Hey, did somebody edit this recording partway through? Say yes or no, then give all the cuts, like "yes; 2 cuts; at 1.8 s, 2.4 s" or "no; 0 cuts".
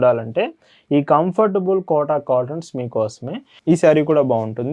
yes; 1 cut; at 3.5 s